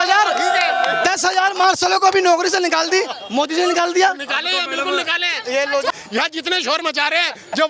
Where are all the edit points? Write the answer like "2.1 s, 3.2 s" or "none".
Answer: 6.0 s